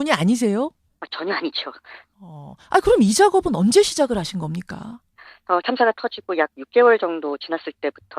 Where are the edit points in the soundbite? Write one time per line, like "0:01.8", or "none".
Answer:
0:04.9